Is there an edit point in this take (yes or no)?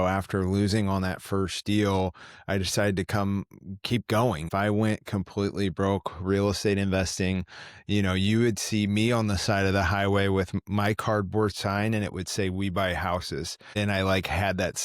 yes